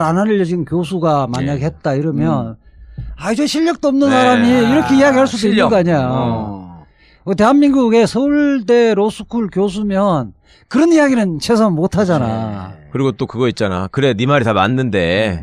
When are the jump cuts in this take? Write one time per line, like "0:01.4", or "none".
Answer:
0:09.2